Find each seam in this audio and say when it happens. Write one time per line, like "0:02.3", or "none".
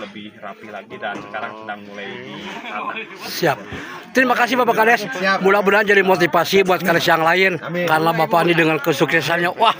none